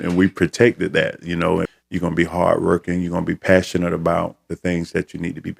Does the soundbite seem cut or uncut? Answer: cut